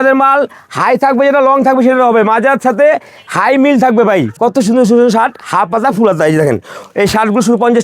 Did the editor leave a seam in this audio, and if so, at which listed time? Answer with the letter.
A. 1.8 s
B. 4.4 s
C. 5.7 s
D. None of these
B